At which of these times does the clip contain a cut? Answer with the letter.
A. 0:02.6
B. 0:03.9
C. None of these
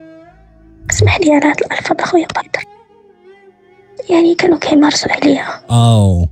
A